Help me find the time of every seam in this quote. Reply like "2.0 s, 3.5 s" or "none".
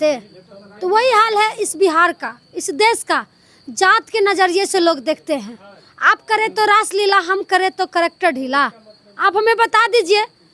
none